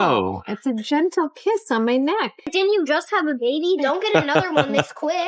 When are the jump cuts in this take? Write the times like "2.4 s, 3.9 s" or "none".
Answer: 2.5 s